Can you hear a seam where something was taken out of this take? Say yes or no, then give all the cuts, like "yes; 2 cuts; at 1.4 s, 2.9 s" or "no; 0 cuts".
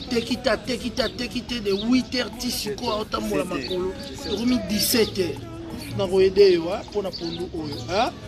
yes; 2 cuts; at 4.2 s, 5.8 s